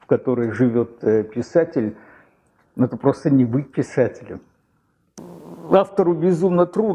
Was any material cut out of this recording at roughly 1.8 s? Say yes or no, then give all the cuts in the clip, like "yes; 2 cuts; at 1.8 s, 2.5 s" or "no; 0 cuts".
no; 1 cut; at 4.8 s